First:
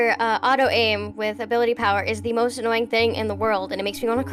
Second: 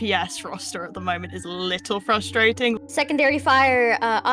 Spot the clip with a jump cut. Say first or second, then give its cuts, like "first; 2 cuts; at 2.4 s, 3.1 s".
second; 1 cut; at 2.8 s